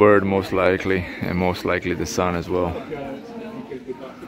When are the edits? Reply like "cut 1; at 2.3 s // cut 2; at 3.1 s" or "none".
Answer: none